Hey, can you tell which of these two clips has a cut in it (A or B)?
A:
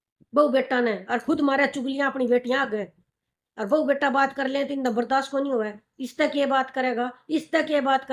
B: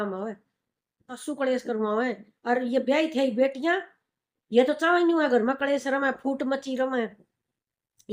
B